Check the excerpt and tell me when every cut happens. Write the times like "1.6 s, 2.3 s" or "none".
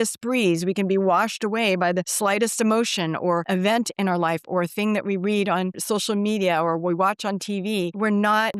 5.7 s